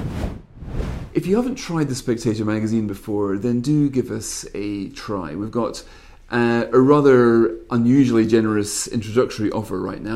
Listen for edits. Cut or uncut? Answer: cut